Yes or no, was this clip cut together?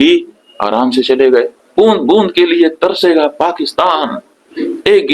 yes